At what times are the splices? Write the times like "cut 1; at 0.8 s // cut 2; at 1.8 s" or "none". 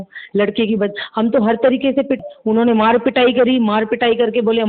cut 1; at 2.2 s